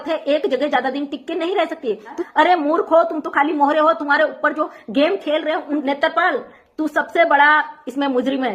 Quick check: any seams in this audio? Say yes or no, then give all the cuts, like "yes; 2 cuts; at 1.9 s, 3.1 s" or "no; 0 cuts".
yes; 2 cuts; at 2.2 s, 5.8 s